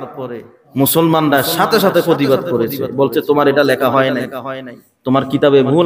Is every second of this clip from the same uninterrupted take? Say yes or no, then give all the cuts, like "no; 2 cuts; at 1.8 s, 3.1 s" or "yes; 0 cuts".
yes; 0 cuts